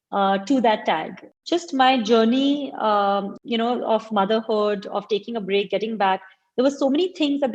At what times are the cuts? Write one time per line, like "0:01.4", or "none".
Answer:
0:01.3